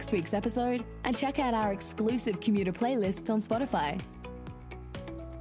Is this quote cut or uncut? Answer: uncut